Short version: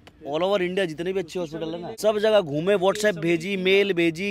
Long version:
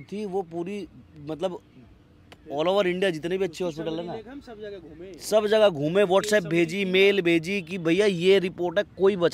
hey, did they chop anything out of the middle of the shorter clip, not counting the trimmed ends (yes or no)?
yes